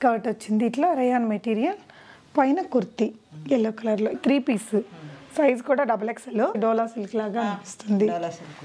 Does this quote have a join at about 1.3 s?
no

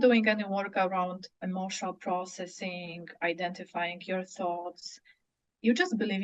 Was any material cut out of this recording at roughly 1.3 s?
yes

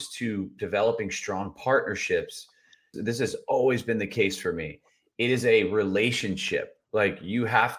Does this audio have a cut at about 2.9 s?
yes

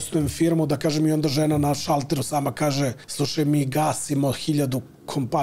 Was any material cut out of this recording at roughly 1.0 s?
no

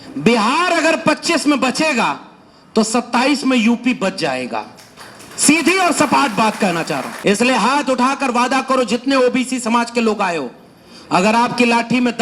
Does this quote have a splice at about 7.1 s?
yes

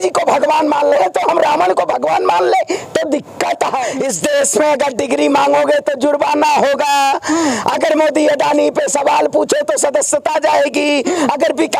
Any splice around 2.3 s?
no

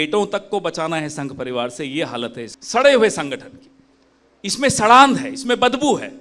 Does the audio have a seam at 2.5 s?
yes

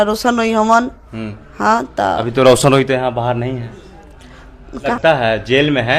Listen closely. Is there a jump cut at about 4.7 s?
no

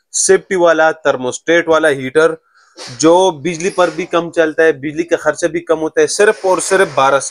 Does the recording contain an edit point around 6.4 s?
no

